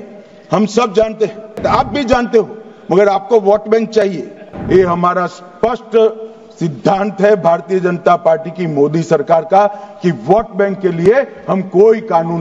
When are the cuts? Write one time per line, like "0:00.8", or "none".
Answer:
0:01.6
0:04.5